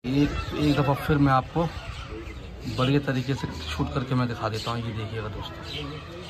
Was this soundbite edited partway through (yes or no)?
no